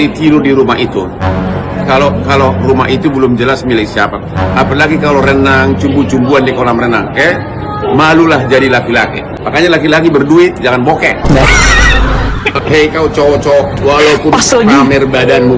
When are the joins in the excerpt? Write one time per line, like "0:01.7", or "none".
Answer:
0:09.3